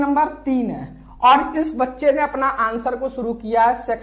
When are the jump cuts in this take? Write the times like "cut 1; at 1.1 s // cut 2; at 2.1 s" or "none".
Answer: none